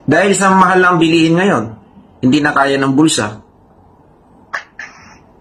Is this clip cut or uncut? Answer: uncut